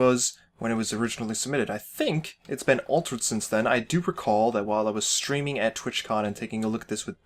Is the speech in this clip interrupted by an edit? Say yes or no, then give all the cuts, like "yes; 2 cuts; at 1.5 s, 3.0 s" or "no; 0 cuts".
yes; 1 cut; at 3.4 s